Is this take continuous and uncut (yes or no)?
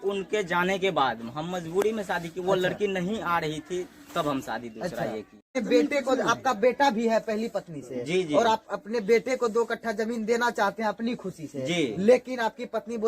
no